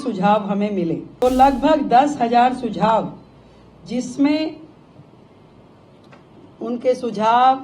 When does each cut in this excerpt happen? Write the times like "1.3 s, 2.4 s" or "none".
1.1 s